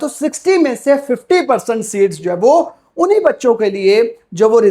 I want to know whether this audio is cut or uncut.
uncut